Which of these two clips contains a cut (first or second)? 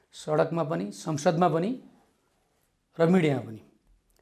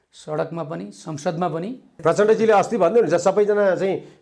second